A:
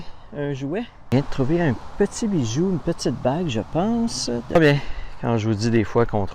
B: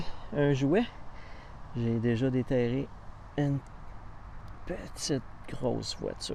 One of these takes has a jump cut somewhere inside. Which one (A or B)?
A